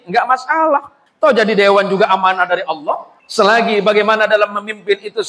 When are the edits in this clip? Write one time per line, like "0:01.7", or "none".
0:01.0
0:03.1